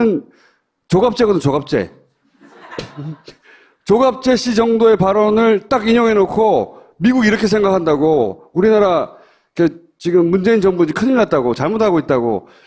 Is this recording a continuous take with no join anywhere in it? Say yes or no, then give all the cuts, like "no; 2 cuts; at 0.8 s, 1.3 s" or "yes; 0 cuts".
no; 1 cut; at 4.8 s